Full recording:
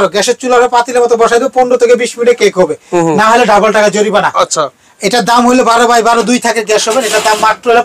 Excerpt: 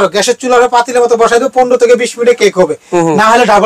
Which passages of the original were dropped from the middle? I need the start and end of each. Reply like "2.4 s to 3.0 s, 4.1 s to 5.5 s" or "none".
none

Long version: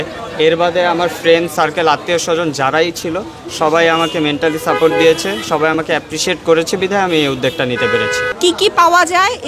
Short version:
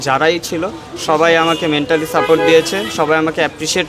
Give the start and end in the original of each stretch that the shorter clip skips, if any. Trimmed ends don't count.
none

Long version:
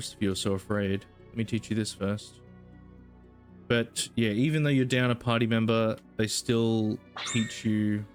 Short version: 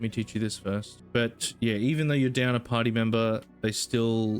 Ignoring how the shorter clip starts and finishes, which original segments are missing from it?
2.3 s to 3.5 s

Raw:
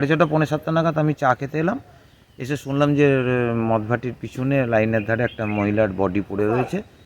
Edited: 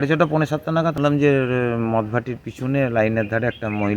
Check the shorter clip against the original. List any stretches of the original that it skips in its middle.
0.9 s to 2.7 s

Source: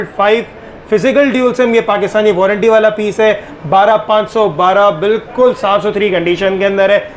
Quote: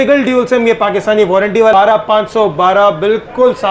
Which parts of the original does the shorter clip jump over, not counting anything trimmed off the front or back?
2.8 s to 3.7 s

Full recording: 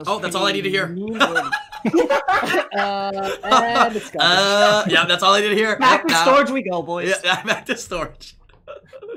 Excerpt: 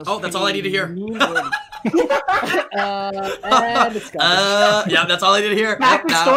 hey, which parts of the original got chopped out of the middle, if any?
none

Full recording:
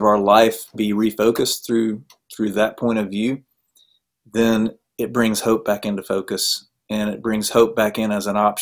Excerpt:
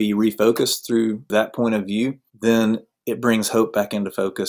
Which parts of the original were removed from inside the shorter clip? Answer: 2.1 s to 2.5 s, 3.5 s to 4.2 s

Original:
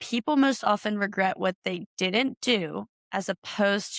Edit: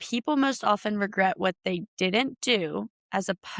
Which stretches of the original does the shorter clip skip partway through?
none

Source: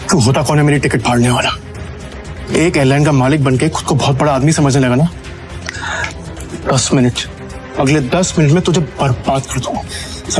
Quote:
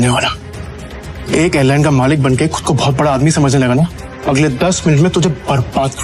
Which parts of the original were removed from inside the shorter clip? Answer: 5.3 s to 7.6 s

